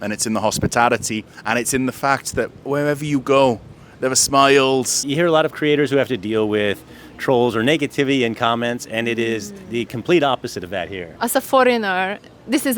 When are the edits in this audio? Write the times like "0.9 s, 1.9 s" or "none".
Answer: 5.0 s, 11.0 s